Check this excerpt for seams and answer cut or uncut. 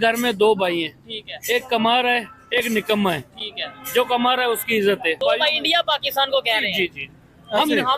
cut